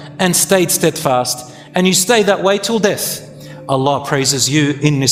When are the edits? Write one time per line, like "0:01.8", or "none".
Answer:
none